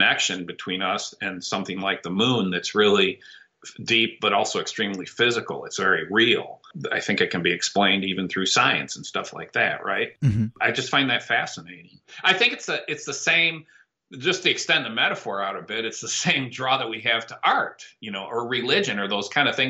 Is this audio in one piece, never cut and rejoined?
yes; 0 cuts

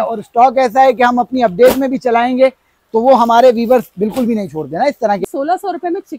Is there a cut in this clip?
yes; 1 cut; at 5.2 s

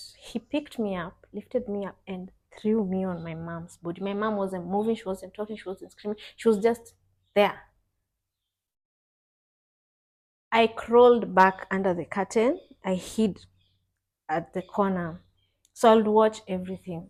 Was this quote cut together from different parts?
no; 0 cuts

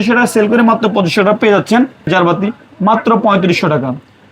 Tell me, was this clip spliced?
yes; 1 cut; at 2.1 s

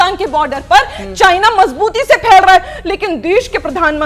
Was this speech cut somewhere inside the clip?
no; 0 cuts

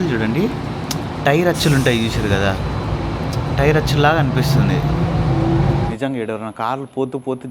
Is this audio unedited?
no; 1 cut; at 5.9 s

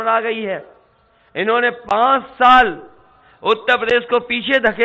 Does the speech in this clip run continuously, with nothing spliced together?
yes; 0 cuts

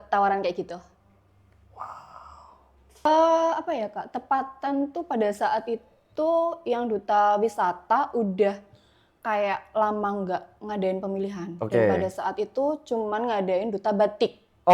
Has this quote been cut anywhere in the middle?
yes; 1 cut; at 3.0 s

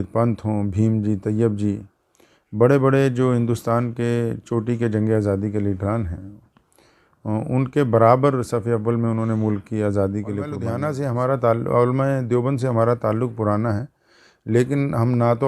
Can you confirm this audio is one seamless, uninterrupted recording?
no; 1 cut; at 10.7 s

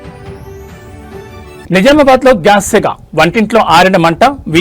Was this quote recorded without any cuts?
no; 1 cut; at 1.6 s

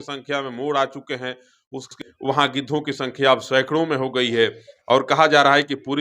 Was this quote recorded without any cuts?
no; 1 cut; at 1.9 s

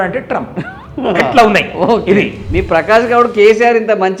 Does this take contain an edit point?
yes; 1 cut; at 2.4 s

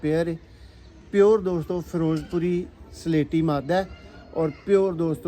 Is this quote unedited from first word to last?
yes; 0 cuts

